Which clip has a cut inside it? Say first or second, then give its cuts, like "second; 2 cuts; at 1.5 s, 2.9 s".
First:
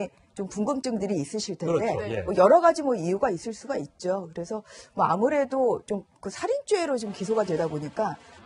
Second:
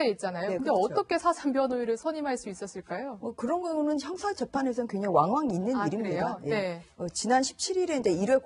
first; 1 cut; at 6.5 s